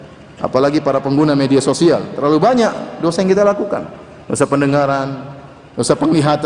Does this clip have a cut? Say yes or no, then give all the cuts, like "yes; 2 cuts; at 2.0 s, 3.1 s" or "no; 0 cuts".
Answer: no; 0 cuts